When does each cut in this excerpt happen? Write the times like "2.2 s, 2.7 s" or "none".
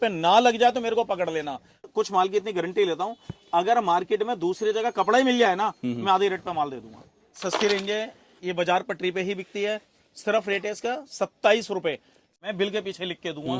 1.9 s, 7.4 s, 12.3 s